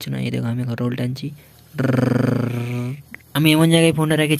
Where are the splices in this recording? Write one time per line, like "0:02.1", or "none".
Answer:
none